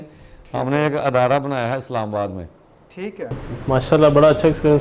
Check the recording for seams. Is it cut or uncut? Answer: cut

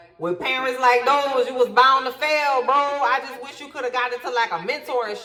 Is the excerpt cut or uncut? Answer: uncut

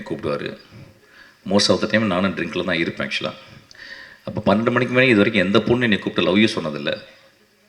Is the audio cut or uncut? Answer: uncut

